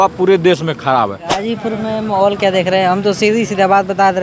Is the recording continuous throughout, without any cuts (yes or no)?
no